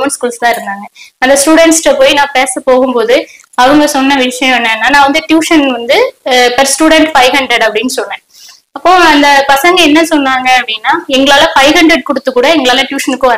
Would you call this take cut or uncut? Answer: uncut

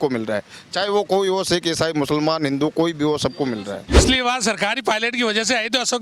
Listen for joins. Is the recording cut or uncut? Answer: cut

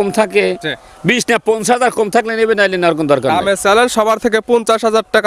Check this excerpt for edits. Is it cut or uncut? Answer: uncut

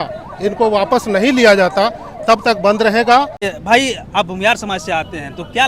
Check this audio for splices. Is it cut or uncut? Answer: cut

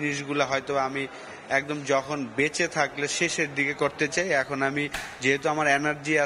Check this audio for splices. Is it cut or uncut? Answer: uncut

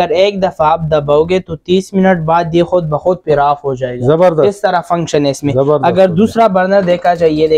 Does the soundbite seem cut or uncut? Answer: uncut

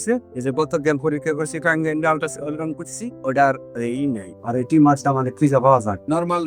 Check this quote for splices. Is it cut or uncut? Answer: uncut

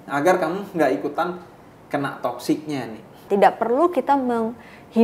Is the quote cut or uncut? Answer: cut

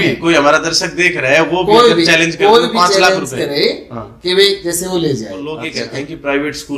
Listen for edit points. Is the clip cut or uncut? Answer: cut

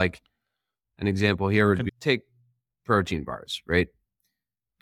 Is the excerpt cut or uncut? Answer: cut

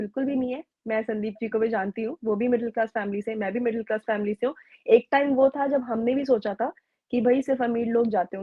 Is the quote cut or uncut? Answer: uncut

